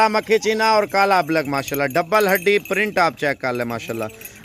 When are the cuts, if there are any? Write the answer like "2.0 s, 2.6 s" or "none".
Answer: none